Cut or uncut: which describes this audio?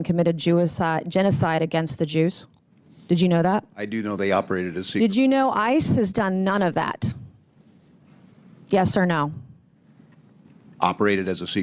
uncut